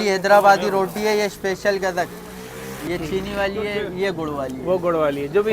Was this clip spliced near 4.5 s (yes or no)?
no